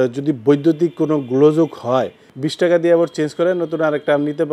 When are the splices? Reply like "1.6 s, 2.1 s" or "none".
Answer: 2.4 s

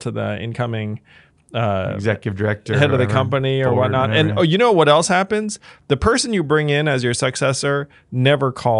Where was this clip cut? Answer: none

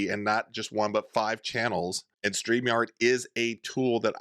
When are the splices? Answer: 2.1 s

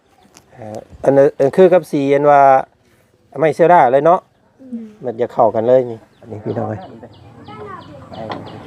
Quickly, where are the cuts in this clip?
6.4 s

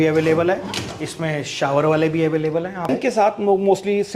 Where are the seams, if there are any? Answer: 2.9 s

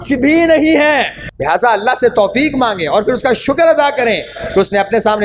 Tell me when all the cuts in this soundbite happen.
1.2 s

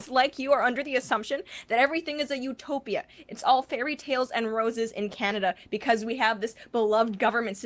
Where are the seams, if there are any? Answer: 5.6 s, 6.4 s

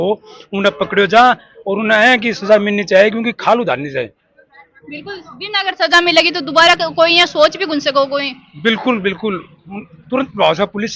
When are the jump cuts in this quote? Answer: none

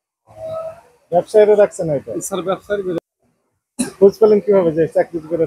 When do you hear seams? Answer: 3.0 s

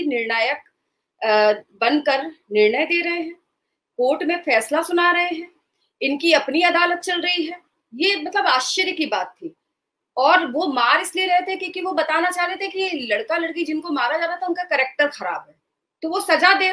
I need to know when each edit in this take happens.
none

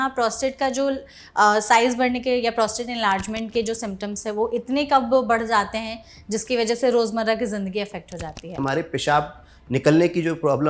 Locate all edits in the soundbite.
8.5 s

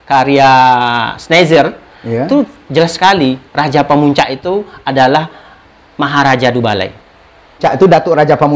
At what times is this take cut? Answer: 7.6 s

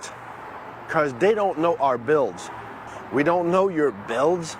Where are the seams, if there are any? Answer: 3.0 s

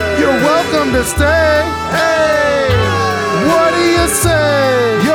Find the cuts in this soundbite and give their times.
none

